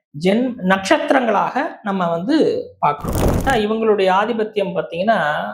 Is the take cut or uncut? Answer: cut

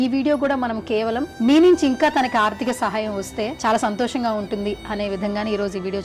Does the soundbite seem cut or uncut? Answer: cut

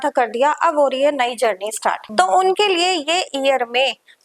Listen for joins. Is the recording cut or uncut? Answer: cut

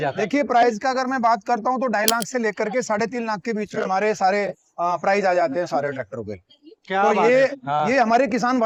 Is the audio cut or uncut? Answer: uncut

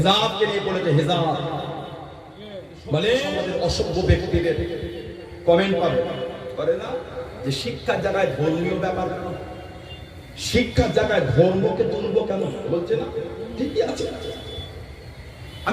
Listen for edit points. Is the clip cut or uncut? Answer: cut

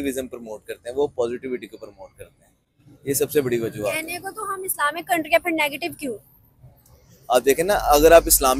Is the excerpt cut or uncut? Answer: uncut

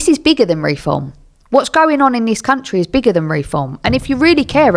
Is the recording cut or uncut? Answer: uncut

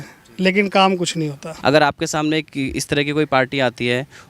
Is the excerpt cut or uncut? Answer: cut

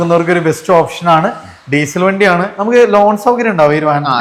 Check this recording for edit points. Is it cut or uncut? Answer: uncut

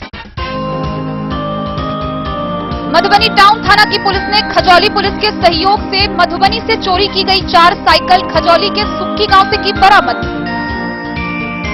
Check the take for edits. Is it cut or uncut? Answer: uncut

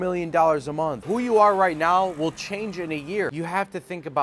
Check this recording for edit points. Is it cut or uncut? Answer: cut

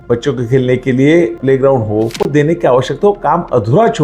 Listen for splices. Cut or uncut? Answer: cut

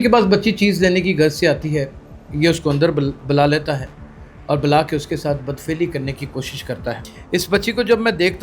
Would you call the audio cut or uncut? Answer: cut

